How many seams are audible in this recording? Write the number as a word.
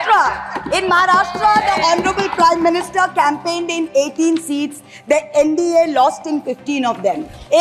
zero